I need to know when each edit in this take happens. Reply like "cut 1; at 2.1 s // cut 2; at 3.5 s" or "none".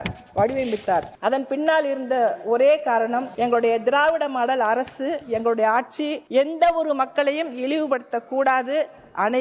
cut 1; at 1.1 s // cut 2; at 3.3 s // cut 3; at 6.2 s